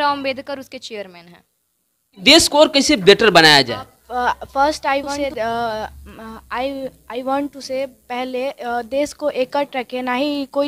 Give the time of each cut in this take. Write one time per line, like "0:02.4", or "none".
0:02.2